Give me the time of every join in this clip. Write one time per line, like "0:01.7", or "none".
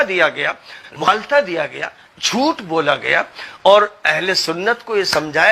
0:01.1